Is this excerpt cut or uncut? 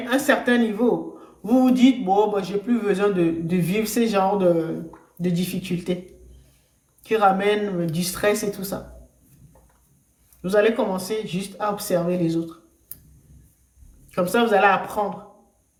uncut